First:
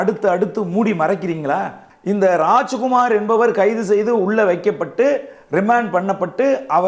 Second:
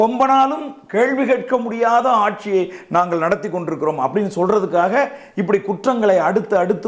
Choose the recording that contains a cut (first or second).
first